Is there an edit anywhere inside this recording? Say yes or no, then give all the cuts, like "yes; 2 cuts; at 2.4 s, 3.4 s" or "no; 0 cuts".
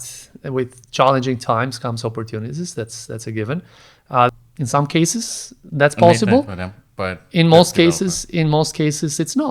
yes; 1 cut; at 4.3 s